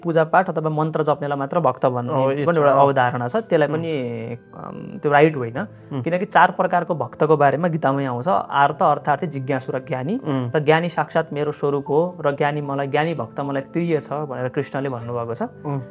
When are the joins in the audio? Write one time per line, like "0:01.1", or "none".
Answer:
none